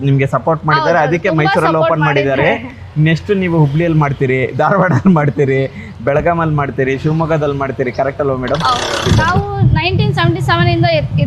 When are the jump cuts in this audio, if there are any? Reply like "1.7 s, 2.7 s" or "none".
9.1 s